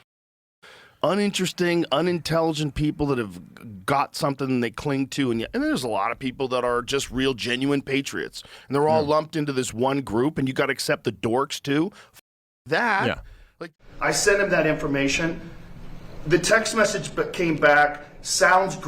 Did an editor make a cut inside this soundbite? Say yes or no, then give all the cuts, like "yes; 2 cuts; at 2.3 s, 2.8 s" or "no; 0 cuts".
yes; 1 cut; at 13.6 s